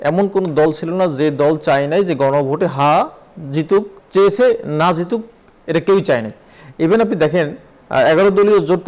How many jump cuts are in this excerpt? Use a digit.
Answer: 1